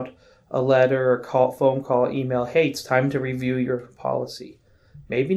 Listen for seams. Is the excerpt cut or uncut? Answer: uncut